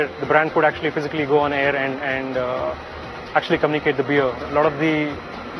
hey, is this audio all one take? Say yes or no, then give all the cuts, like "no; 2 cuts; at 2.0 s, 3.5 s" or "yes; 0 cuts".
no; 1 cut; at 4.4 s